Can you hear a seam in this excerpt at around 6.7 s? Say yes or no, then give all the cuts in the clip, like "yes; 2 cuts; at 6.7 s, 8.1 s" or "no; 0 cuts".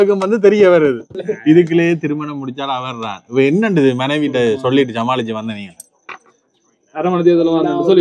no; 1 cut; at 1.3 s